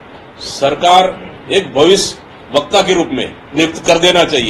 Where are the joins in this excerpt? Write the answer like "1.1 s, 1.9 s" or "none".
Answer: 3.4 s